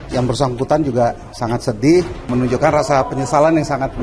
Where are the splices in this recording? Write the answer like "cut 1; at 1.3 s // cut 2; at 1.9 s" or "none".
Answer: cut 1; at 2.3 s